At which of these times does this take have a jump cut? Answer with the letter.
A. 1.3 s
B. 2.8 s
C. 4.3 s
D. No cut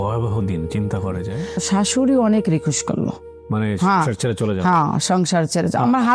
A